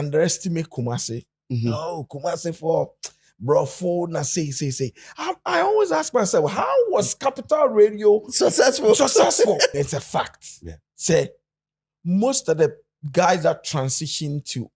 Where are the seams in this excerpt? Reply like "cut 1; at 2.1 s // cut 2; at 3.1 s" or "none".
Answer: cut 1; at 9.7 s